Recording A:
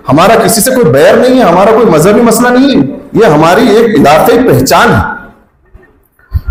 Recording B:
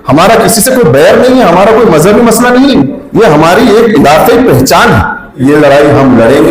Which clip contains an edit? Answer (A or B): B